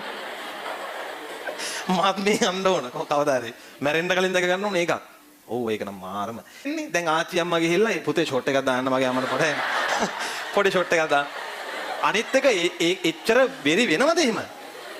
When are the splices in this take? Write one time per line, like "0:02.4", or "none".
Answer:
0:06.7